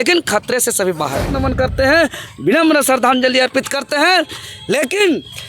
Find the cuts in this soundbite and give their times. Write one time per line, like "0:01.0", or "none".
0:01.3